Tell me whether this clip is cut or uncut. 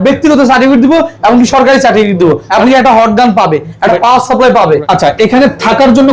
cut